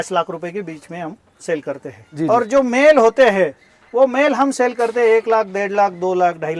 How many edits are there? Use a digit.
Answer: 1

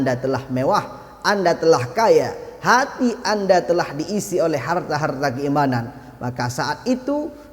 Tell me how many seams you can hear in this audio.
0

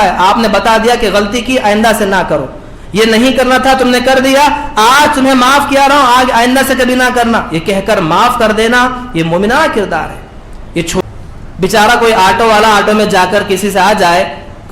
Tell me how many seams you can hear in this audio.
1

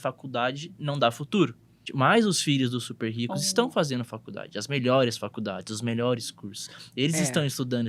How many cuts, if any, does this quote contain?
1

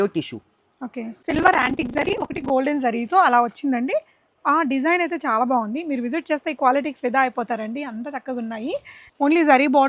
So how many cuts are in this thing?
2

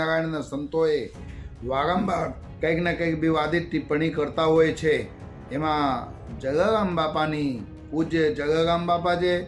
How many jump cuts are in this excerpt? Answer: 1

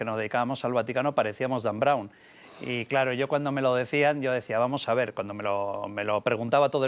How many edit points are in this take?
0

